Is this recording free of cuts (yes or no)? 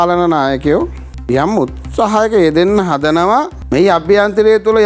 no